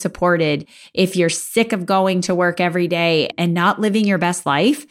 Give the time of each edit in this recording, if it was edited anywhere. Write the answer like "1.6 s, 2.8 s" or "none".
3.3 s